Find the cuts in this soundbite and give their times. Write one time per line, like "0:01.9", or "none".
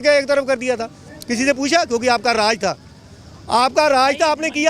none